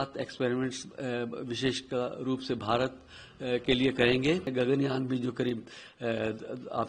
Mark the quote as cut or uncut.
cut